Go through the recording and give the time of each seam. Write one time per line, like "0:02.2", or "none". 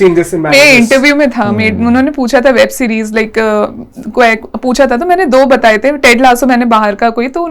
none